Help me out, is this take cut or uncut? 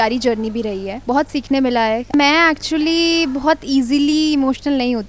cut